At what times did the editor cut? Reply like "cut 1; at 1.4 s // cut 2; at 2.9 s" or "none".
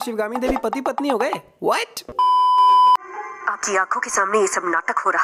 none